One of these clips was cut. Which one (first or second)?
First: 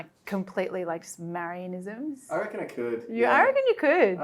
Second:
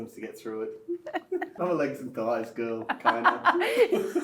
second